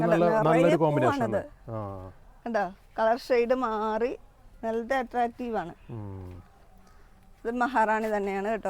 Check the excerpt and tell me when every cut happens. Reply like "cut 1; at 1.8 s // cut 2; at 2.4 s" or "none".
none